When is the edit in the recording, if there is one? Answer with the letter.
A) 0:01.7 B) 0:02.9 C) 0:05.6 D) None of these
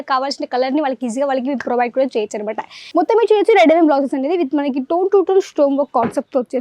B